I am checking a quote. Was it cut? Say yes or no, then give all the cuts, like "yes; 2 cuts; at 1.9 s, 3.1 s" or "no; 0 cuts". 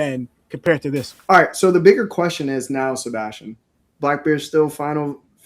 yes; 1 cut; at 1.1 s